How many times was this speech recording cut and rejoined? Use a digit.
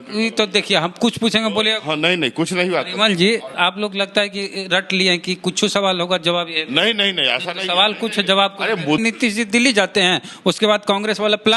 2